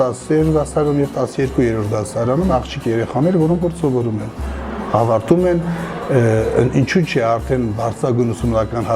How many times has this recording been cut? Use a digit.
1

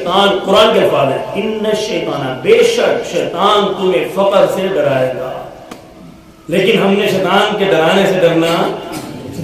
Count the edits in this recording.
0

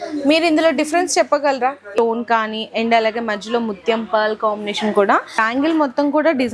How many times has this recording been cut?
2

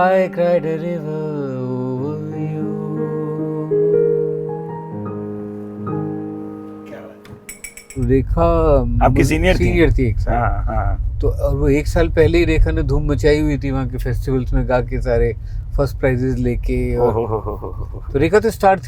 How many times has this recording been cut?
1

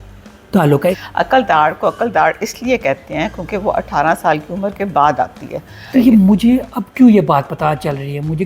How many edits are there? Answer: 2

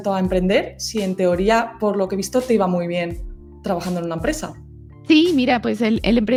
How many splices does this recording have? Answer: 0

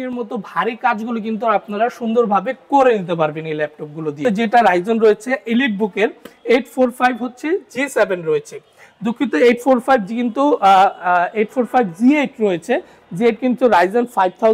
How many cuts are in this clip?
1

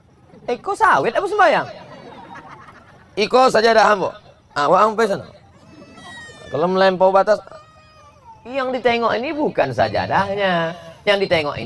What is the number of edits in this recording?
0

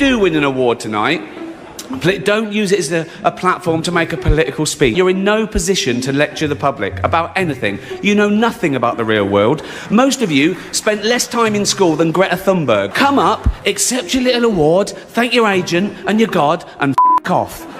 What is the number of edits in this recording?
2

